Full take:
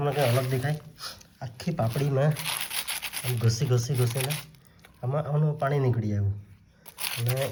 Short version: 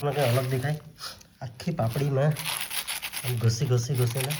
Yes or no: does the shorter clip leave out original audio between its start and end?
no